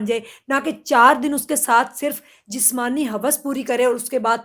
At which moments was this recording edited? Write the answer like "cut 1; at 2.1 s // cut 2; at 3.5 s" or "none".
none